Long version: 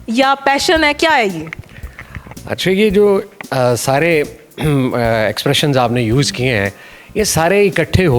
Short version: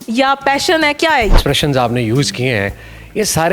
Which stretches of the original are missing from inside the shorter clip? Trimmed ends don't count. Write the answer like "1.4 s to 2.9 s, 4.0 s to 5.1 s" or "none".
1.4 s to 5.4 s